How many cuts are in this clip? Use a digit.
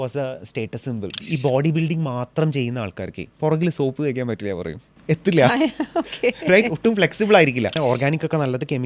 2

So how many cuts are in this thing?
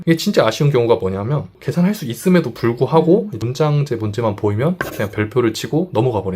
1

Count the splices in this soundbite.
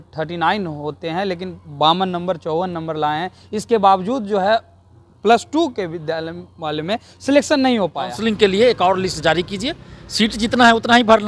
1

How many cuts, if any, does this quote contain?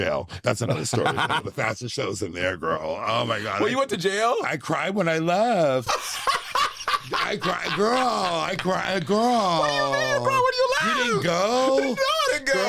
1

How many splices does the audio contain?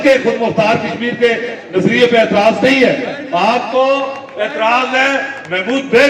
0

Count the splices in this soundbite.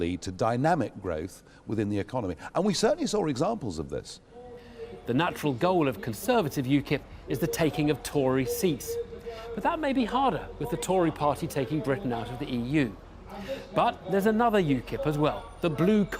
1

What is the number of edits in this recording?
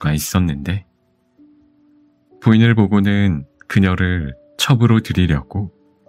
2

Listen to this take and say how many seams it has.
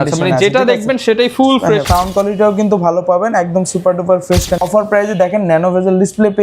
2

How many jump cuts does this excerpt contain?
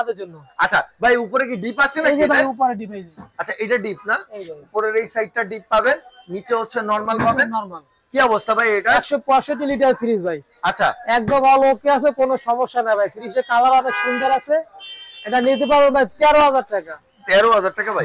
0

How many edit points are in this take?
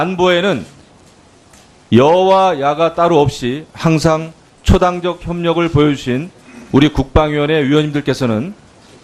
1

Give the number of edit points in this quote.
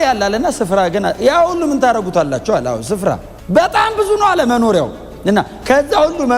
1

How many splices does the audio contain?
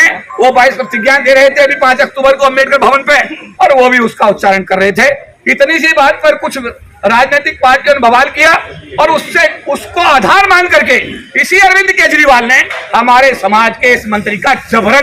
0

